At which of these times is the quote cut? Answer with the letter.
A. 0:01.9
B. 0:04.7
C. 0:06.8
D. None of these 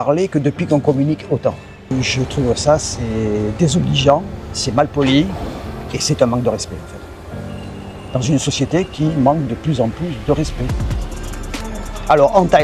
A